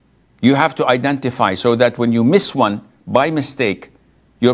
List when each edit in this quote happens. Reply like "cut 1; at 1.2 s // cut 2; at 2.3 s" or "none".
none

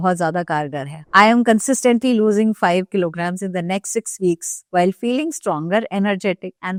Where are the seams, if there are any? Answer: none

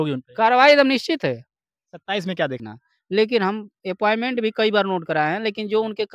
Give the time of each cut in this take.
cut 1; at 2.6 s

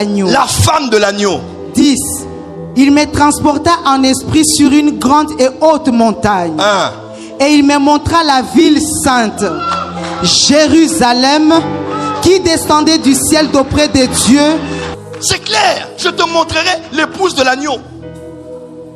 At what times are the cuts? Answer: cut 1; at 14.8 s

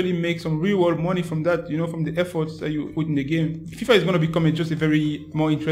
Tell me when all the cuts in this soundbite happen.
cut 1; at 2.9 s // cut 2; at 3.7 s

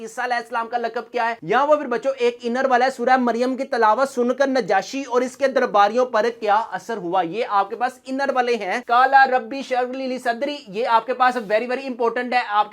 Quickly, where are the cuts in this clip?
cut 1; at 1.4 s // cut 2; at 8.8 s

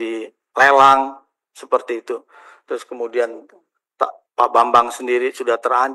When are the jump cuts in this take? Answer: none

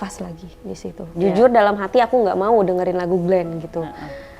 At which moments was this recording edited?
cut 1; at 1.0 s

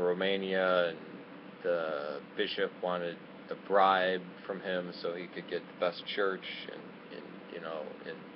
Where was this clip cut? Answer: cut 1; at 1.5 s

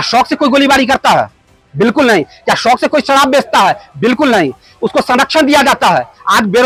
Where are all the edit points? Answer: none

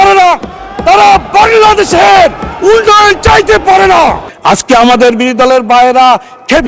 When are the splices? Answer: cut 1; at 4.3 s

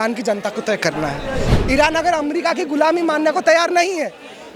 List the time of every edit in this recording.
cut 1; at 1.5 s

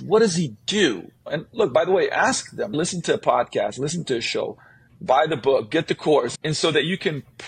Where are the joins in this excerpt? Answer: none

